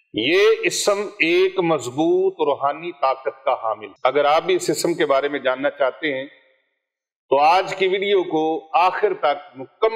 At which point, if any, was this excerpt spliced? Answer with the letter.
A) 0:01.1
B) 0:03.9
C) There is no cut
B